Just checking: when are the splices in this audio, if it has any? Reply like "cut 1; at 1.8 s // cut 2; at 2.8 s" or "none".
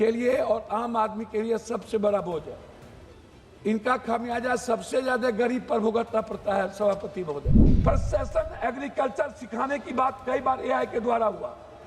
cut 1; at 7.6 s